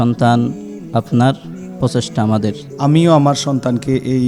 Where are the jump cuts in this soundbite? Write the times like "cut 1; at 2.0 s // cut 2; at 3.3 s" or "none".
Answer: cut 1; at 2.7 s